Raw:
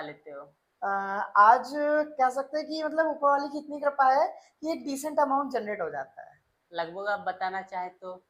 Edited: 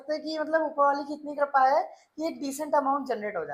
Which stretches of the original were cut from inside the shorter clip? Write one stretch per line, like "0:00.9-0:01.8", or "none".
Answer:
none